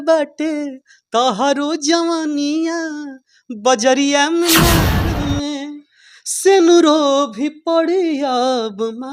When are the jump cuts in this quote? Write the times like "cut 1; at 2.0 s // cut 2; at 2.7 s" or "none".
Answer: cut 1; at 5.0 s